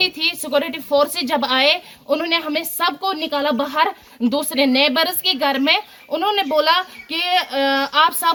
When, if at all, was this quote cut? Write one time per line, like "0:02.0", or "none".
none

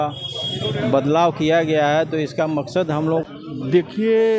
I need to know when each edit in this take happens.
0:03.2

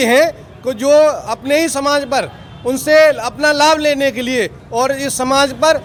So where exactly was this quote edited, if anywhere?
none

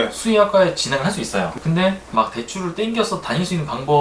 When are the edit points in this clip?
0:02.0

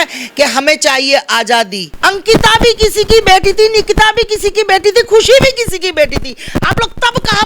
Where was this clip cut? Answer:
0:01.8

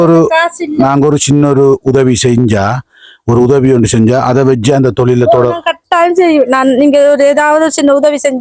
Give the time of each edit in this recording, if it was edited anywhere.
none

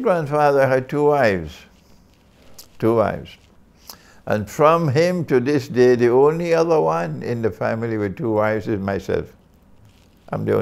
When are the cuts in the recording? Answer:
none

